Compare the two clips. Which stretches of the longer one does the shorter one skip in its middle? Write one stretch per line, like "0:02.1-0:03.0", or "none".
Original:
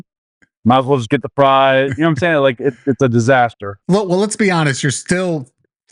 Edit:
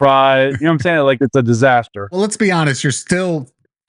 0:02.5-0:02.8
0:03.8-0:04.1